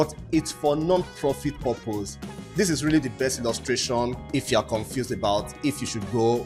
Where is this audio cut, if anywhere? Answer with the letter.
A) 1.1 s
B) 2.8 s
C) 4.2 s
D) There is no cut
C